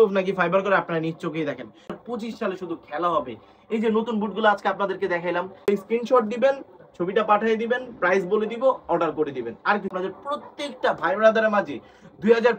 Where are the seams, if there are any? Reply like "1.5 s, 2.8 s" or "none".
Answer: 1.9 s, 5.7 s, 9.9 s